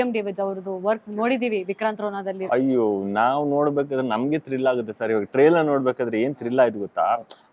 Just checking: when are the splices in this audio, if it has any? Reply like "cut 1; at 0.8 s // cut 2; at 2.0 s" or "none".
cut 1; at 2.4 s